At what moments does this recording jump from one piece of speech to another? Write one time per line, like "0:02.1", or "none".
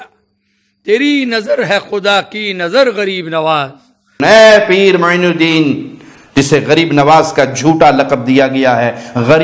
0:04.2

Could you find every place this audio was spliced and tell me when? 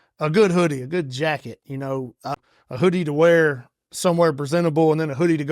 0:02.4

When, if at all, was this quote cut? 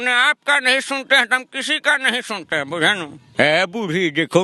0:03.2

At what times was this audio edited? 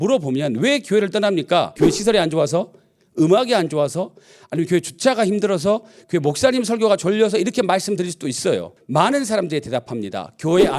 0:01.7
0:08.7

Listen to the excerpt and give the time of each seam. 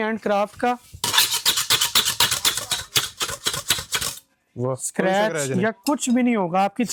none

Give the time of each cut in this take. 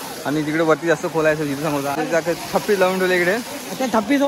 0:02.0

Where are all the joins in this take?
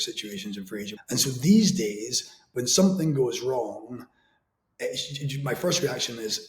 0:01.0

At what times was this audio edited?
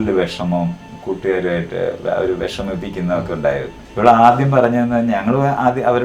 0:03.8

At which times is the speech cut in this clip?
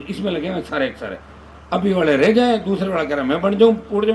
none

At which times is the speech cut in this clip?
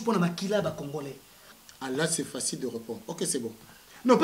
0:01.5

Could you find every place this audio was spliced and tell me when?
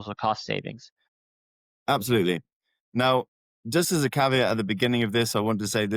0:01.1

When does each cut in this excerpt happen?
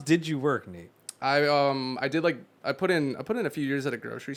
none

